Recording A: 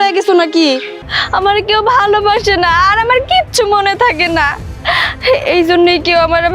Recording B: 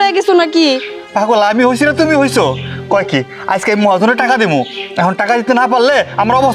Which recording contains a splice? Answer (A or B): A